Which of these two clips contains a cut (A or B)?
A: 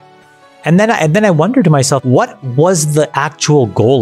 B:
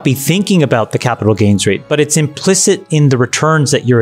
A